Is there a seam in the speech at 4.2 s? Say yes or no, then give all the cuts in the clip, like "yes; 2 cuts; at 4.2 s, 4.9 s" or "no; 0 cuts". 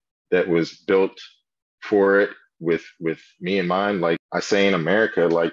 yes; 1 cut; at 4.2 s